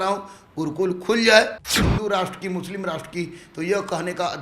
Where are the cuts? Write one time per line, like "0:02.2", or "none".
0:01.7